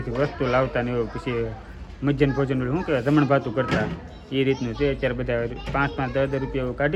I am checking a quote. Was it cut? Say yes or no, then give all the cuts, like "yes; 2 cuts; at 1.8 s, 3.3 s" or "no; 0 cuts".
no; 0 cuts